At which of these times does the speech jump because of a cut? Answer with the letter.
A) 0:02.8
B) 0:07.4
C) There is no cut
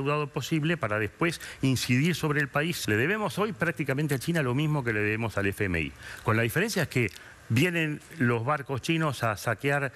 A